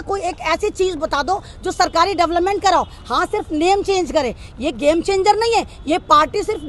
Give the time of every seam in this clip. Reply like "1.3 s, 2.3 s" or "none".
none